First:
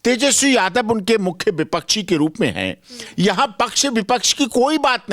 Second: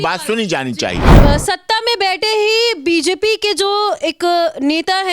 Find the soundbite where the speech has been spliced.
second; 1 cut; at 1.1 s

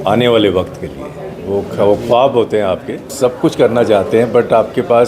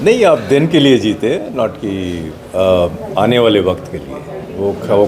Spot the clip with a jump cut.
first; 1 cut; at 3.1 s

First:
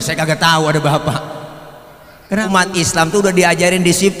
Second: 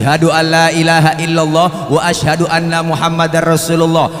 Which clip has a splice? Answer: first; 1 cut; at 2.4 s

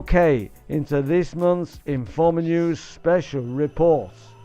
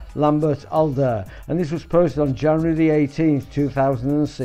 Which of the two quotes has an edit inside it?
first; 1 cut; at 2.4 s

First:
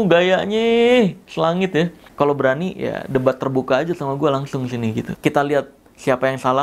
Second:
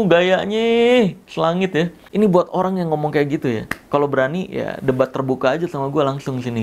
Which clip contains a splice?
first; 2 cuts; at 2.0 s, 5.1 s

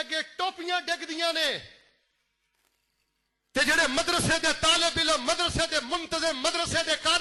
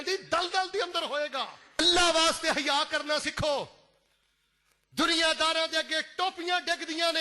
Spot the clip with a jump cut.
second; 1 cut; at 1.8 s

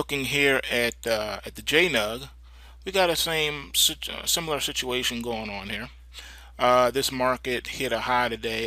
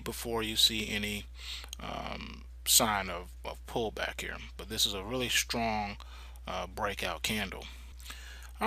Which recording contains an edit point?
second; 1 cut; at 1.9 s

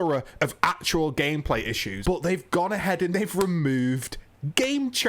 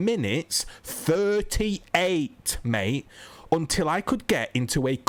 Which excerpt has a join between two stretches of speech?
first; 1 cut; at 1.9 s

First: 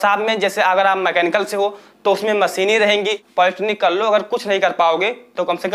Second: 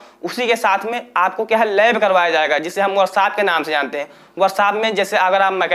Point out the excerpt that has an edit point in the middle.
first; 1 cut; at 3.2 s

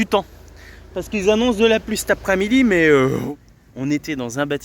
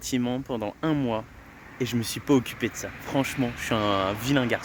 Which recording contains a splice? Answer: first; 1 cut; at 3.2 s

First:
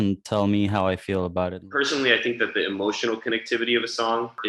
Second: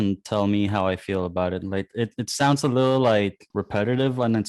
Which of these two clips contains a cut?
first; 1 cut; at 1.6 s

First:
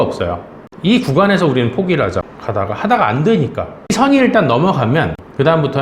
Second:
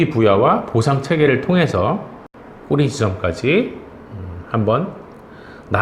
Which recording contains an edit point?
first; 1 cut; at 3.8 s

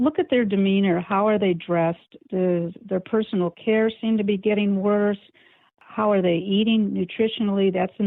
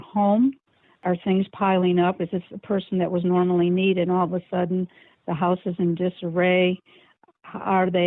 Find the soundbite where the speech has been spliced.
second; 1 cut; at 0.9 s

